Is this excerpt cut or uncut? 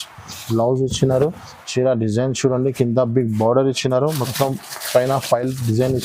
uncut